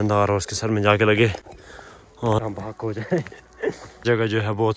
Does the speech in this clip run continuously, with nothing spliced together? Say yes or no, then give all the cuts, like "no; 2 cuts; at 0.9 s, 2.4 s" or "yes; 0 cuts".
no; 2 cuts; at 2.4 s, 3.9 s